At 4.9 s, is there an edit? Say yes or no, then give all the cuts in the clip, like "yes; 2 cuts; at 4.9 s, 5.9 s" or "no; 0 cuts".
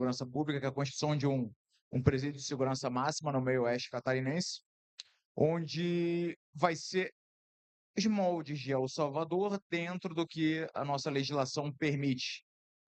no; 0 cuts